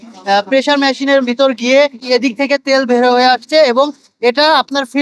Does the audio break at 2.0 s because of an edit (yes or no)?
yes